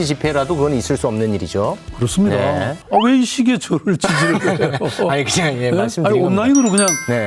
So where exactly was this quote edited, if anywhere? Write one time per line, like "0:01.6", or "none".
none